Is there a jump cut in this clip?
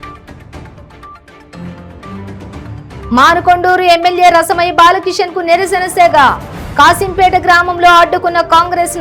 yes; 1 cut; at 1.3 s

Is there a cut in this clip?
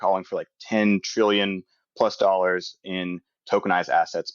no; 0 cuts

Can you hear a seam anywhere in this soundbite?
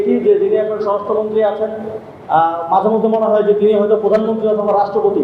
no; 0 cuts

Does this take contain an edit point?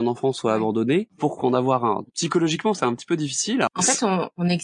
yes; 3 cuts; at 1.1 s, 2.0 s, 3.7 s

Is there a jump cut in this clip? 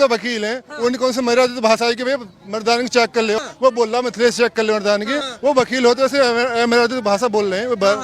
yes; 2 cuts; at 3.4 s, 5.2 s

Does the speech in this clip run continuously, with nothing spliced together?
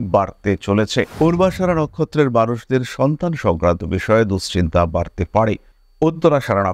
no; 2 cuts; at 1.1 s, 5.7 s

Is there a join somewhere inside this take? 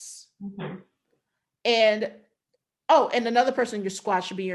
no; 0 cuts

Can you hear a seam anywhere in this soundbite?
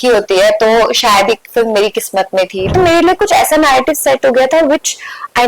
yes; 1 cut; at 2.7 s

